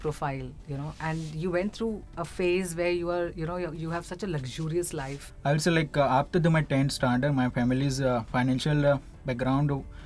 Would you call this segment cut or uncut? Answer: cut